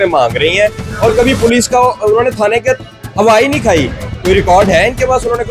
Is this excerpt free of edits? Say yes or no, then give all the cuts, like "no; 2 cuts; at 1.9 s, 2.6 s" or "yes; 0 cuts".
yes; 0 cuts